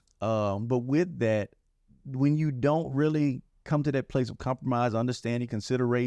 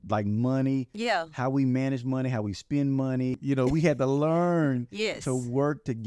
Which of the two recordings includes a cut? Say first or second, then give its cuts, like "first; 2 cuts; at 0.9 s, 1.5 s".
second; 1 cut; at 3.4 s